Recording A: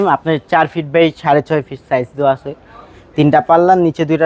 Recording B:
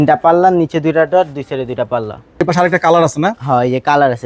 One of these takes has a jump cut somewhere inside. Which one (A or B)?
B